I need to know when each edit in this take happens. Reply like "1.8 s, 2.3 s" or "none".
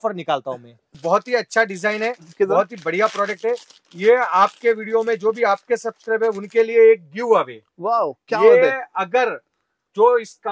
1.0 s